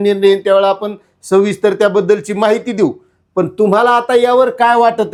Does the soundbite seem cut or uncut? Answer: uncut